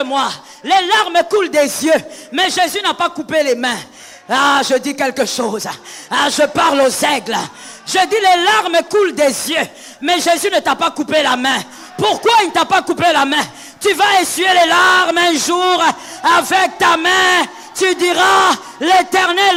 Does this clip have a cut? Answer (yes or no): no